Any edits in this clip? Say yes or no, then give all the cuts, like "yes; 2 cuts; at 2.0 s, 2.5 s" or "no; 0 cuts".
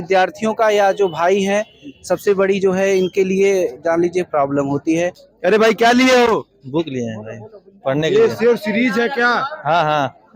yes; 1 cut; at 5.2 s